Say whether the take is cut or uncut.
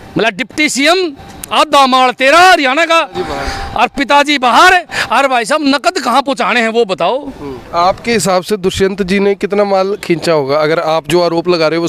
cut